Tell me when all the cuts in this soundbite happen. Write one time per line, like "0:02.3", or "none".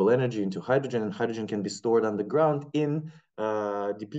none